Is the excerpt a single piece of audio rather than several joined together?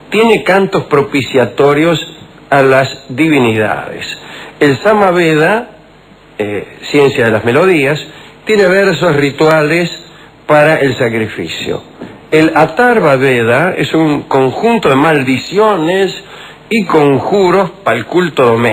no; 1 cut; at 1.7 s

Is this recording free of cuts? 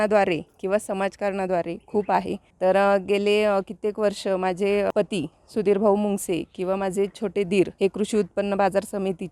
no; 3 cuts; at 2.4 s, 4.9 s, 7.7 s

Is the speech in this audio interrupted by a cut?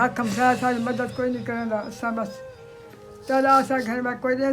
no; 0 cuts

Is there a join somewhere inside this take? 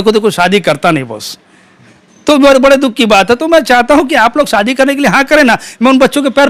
no; 0 cuts

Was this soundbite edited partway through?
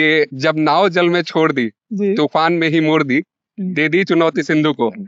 no; 0 cuts

